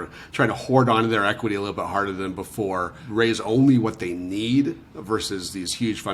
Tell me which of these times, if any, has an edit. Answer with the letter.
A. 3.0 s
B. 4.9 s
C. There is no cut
A